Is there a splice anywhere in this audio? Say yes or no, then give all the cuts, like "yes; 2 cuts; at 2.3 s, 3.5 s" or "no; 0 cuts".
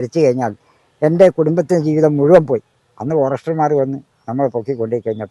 no; 0 cuts